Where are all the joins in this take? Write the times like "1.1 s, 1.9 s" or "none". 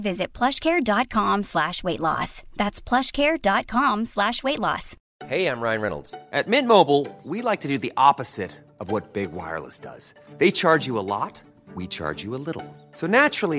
4.9 s

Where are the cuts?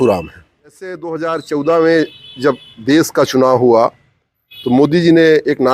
1.1 s

